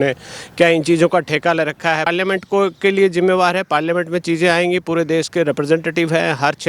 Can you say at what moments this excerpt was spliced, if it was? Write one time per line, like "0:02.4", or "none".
0:02.1